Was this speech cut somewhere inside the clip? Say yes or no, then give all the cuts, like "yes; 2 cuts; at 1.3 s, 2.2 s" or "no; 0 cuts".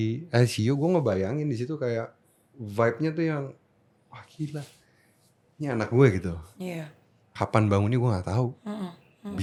no; 0 cuts